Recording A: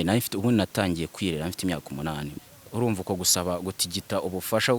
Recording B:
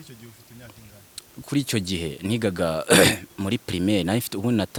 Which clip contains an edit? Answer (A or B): A